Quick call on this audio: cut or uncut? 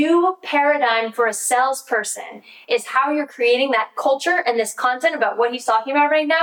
uncut